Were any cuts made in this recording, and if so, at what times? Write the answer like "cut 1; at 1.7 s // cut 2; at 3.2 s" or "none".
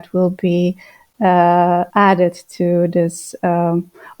cut 1; at 1.9 s